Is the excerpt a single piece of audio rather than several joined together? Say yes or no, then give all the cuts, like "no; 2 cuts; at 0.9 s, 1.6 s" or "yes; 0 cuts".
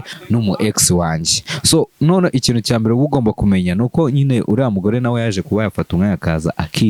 yes; 0 cuts